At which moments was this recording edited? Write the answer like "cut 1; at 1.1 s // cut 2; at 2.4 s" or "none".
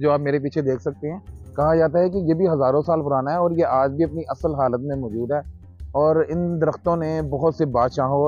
none